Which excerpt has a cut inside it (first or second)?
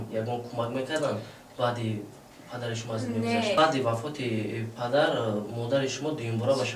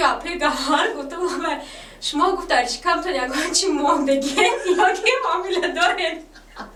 first